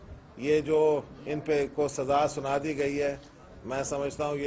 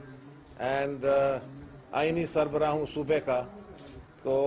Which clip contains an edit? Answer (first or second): second